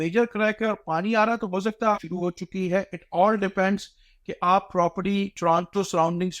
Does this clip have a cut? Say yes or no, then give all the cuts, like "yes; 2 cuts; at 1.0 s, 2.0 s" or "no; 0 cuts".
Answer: yes; 1 cut; at 2.0 s